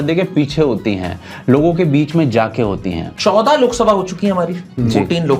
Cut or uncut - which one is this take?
cut